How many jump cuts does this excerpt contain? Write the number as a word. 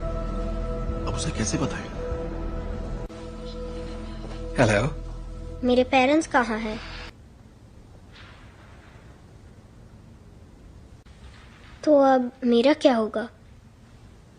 one